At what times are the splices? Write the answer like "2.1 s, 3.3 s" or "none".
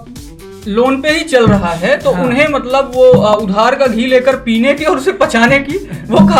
none